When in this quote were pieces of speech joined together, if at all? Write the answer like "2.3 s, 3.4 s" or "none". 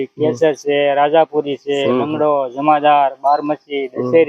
none